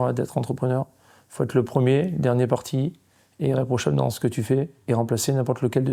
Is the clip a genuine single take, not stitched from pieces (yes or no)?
yes